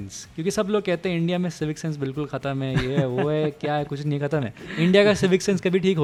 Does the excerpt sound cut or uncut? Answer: uncut